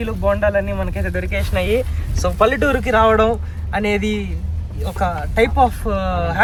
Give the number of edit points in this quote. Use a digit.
0